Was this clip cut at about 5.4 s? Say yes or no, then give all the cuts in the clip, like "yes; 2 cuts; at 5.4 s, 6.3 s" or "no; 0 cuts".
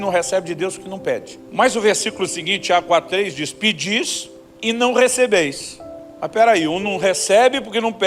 no; 1 cut; at 1.4 s